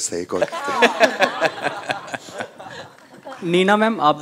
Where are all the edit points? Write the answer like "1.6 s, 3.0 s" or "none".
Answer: none